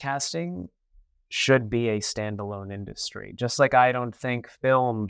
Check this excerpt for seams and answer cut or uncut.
uncut